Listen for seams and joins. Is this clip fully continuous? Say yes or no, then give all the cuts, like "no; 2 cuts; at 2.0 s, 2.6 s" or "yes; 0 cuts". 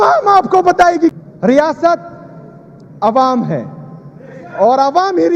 no; 1 cut; at 1.1 s